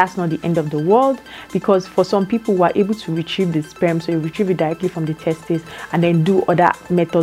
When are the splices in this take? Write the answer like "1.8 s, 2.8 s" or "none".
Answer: none